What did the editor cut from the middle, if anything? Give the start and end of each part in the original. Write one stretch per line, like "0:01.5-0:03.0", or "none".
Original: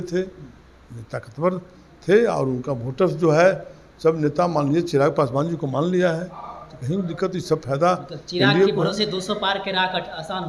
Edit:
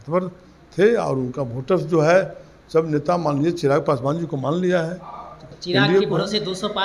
0:06.8-0:08.1